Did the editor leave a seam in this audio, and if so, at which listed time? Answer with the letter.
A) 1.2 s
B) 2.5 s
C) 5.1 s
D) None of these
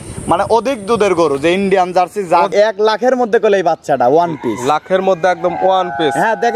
B